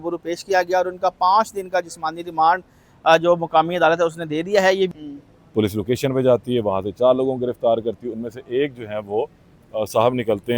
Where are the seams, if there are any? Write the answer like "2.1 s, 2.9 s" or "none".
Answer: 5.0 s